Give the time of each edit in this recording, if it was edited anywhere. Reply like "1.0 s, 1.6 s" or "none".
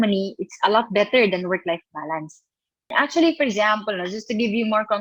2.9 s

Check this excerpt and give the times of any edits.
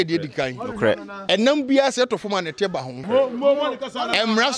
1.1 s, 2.9 s

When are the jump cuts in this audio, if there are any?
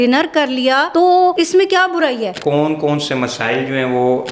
1.2 s, 2.4 s

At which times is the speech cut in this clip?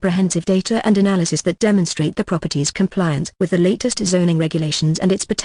1.7 s

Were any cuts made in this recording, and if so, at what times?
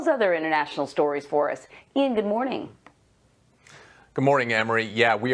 1.7 s

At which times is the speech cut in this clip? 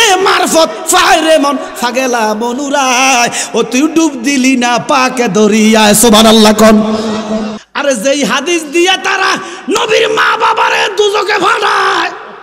7.6 s

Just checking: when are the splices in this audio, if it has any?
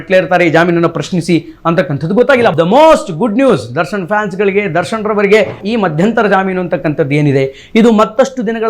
2.5 s, 5.6 s

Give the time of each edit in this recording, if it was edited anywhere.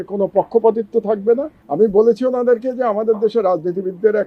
1.6 s

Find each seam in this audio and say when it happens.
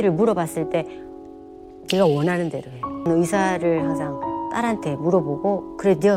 3.1 s

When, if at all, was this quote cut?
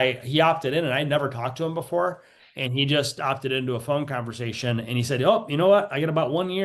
none

